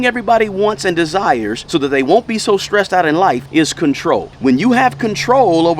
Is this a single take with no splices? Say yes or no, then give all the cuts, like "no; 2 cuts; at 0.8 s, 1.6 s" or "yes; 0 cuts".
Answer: no; 3 cuts; at 1.6 s, 3.4 s, 4.3 s